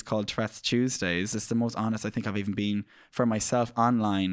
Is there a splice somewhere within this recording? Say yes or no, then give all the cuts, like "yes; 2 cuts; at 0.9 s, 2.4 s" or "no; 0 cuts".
yes; 1 cut; at 1.4 s